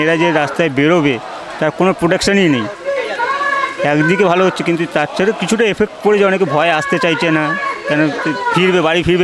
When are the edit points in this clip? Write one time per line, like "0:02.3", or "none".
none